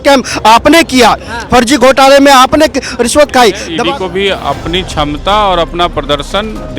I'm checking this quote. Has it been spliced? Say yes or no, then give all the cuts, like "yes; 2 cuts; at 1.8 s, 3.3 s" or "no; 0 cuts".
yes; 1 cut; at 3.7 s